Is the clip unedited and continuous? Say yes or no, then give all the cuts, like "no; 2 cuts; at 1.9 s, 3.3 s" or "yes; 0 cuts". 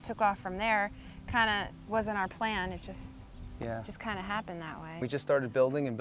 no; 1 cut; at 5.0 s